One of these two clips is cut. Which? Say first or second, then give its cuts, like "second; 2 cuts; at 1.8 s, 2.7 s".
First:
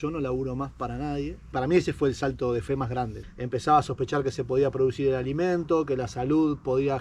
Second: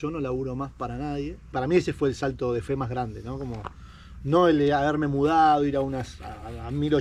first; 1 cut; at 3.3 s